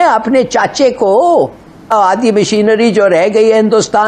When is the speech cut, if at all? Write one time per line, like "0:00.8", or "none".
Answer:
0:01.9